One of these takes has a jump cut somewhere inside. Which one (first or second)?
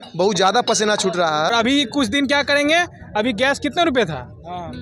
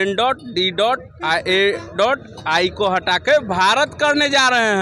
first